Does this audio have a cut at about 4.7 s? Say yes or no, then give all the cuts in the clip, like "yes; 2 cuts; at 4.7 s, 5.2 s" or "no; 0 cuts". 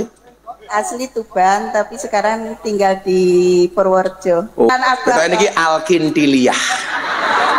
yes; 1 cut; at 4.7 s